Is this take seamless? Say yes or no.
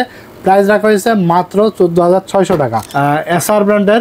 no